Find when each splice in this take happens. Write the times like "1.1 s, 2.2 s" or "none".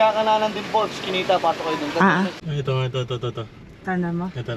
2.4 s